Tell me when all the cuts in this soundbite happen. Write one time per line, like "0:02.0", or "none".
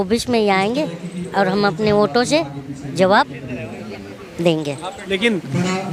none